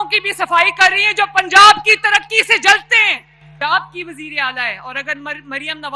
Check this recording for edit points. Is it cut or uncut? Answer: cut